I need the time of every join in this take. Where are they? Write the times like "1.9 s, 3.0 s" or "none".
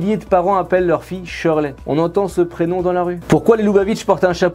none